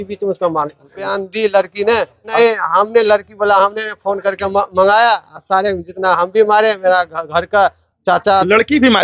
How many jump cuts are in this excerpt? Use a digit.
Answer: 2